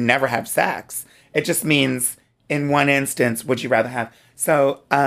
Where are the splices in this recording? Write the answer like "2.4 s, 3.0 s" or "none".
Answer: none